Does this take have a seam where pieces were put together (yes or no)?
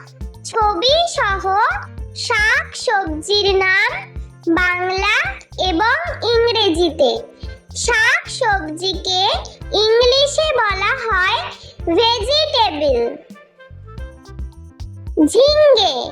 yes